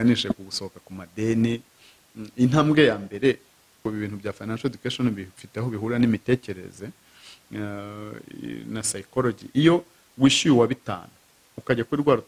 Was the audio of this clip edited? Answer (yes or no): yes